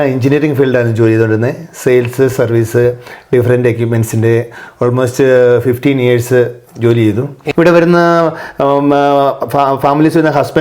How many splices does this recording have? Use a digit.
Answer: 1